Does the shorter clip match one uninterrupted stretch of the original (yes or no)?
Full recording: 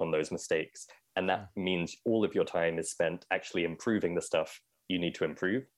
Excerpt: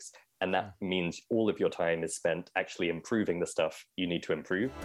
no